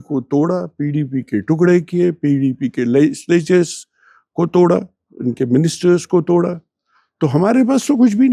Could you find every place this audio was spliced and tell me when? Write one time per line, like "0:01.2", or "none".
none